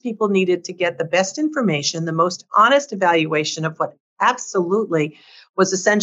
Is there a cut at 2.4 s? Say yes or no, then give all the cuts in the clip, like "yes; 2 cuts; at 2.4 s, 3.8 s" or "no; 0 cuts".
no; 0 cuts